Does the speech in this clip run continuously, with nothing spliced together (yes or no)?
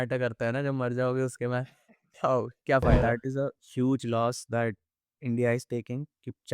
no